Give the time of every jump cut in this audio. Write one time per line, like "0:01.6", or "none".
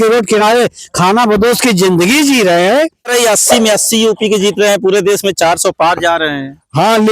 0:03.1